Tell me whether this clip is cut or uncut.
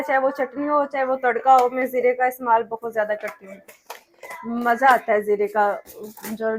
uncut